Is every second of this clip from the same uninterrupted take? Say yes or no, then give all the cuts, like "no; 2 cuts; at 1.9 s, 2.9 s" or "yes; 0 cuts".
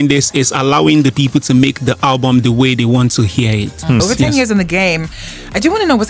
no; 1 cut; at 4.0 s